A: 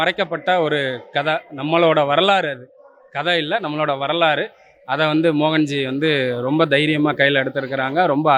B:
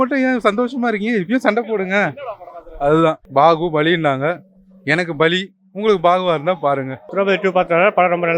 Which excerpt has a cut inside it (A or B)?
B